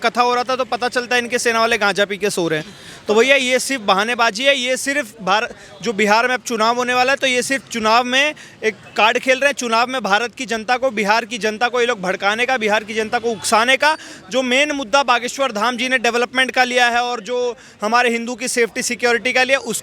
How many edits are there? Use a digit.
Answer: 0